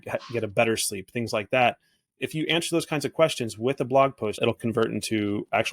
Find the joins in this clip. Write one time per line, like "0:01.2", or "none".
0:04.3